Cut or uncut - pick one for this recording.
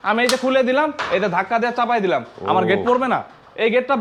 uncut